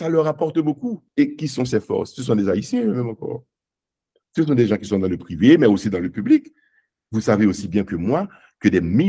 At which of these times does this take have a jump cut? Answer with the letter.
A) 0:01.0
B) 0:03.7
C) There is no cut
A